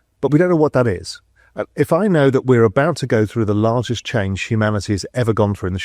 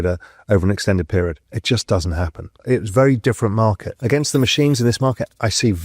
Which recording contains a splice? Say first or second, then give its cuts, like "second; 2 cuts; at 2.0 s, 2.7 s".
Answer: second; 3 cuts; at 1.5 s, 2.6 s, 3.9 s